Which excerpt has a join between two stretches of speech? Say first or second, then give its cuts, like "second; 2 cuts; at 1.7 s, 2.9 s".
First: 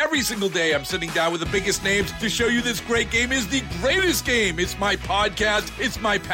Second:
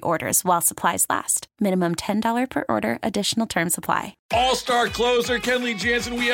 second; 1 cut; at 4.2 s